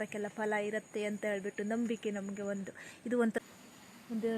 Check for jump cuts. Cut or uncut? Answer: cut